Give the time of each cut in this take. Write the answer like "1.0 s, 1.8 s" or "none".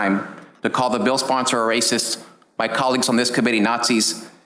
none